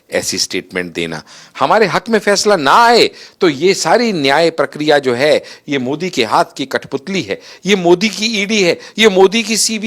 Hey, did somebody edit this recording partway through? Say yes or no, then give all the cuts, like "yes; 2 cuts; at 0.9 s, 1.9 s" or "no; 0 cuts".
no; 0 cuts